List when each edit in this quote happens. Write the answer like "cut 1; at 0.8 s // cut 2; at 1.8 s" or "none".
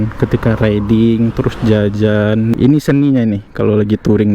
cut 1; at 2.5 s

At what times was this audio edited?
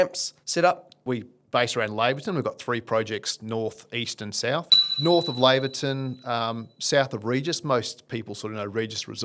cut 1; at 1.0 s // cut 2; at 4.8 s

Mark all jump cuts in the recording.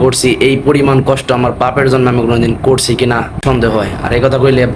cut 1; at 3.4 s

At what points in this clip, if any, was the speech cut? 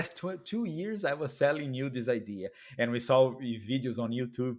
none

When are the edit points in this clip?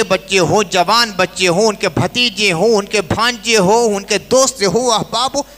none

